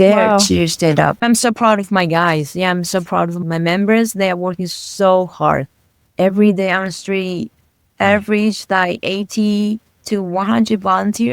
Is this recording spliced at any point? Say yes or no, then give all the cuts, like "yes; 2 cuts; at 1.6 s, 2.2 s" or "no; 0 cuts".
yes; 1 cut; at 1.2 s